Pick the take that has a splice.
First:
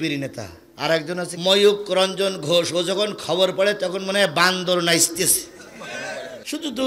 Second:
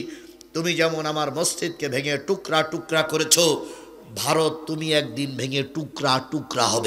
first; 1 cut; at 1.4 s

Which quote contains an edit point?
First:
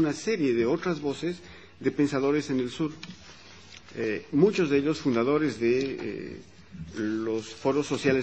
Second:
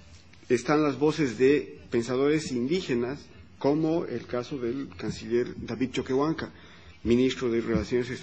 second; 1 cut; at 6.4 s

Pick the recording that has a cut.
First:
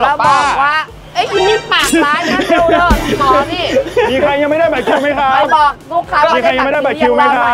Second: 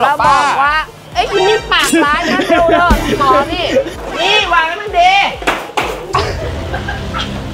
second; 1 cut; at 3.9 s

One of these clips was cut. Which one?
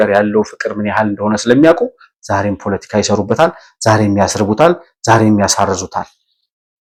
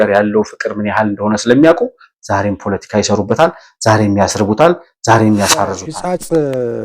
second; 1 cut; at 5.9 s

